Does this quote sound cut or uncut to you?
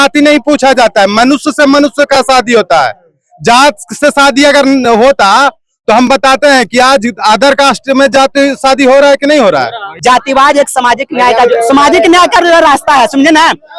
cut